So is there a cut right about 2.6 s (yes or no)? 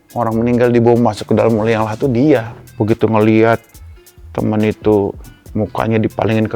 yes